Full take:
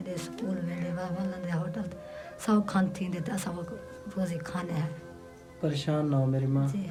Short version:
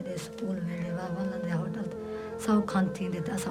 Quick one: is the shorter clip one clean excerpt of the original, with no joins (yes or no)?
yes